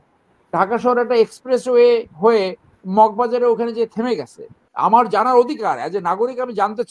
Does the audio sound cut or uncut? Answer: cut